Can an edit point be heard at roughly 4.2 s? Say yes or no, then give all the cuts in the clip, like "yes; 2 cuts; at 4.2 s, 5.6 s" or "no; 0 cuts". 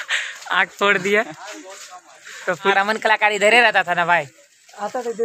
no; 1 cut; at 2.7 s